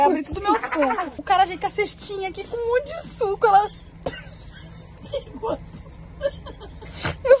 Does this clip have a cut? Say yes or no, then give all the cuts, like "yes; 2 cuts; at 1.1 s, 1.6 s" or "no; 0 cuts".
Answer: yes; 1 cut; at 1.2 s